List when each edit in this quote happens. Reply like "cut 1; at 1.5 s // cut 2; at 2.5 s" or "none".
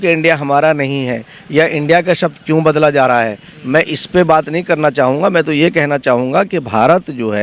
none